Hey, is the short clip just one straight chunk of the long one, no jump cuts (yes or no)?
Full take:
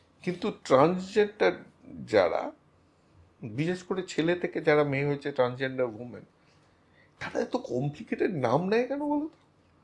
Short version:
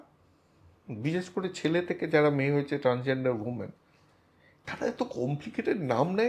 yes